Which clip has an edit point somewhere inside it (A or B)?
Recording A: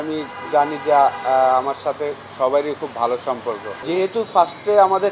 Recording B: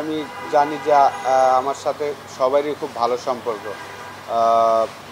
A